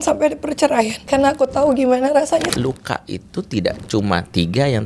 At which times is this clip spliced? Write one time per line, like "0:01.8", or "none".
0:01.0
0:02.5